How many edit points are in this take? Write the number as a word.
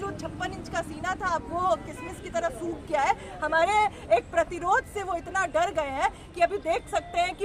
zero